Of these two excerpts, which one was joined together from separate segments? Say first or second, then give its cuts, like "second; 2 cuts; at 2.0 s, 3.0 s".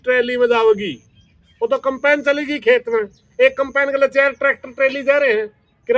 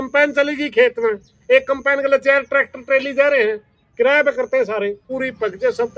second; 1 cut; at 5.1 s